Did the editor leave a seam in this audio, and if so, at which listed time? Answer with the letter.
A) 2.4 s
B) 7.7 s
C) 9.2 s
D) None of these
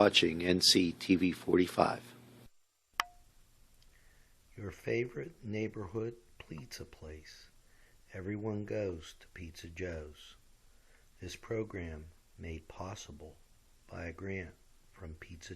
A